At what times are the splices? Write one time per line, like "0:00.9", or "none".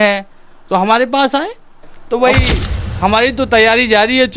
0:01.9